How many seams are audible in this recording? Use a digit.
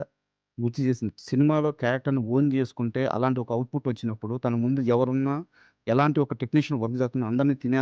1